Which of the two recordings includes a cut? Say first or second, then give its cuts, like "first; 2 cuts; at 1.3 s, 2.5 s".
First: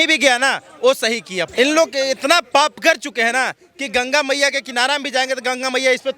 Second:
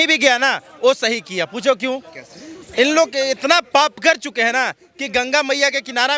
first; 1 cut; at 1.4 s